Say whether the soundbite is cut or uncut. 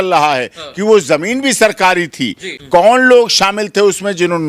cut